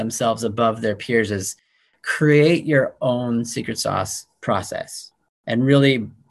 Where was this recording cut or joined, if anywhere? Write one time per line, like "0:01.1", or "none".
0:05.4